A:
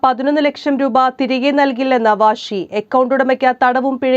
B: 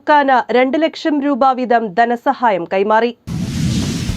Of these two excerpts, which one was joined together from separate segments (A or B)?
B